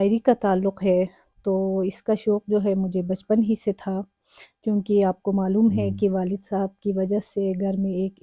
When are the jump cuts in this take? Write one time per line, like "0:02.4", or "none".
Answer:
none